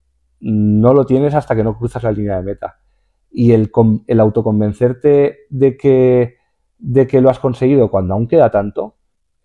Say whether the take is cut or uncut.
uncut